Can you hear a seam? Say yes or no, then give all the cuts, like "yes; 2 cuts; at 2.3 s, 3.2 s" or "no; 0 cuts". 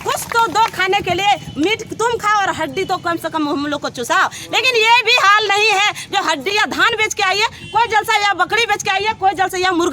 yes; 1 cut; at 6.5 s